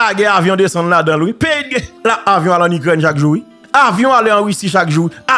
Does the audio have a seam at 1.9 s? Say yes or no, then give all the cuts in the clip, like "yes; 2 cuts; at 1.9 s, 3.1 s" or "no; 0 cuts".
yes; 2 cuts; at 1.9 s, 3.6 s